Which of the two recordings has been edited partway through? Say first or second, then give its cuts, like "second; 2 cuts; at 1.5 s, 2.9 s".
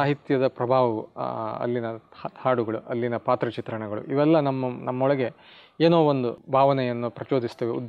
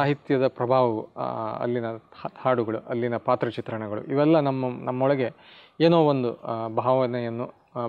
first; 1 cut; at 6.4 s